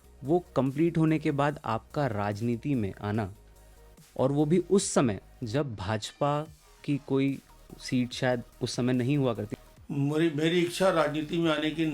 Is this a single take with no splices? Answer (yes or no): no